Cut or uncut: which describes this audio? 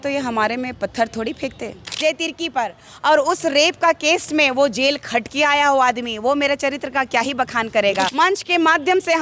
cut